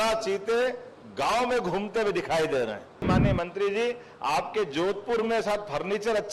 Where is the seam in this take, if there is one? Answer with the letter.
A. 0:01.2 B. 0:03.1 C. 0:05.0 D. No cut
B